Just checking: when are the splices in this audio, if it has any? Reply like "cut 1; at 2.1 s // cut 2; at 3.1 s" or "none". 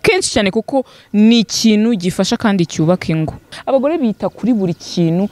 cut 1; at 3.5 s